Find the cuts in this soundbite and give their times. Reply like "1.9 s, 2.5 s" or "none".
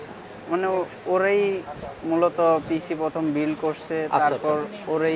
none